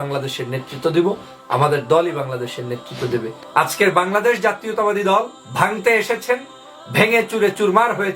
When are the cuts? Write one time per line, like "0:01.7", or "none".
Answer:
0:03.4
0:05.4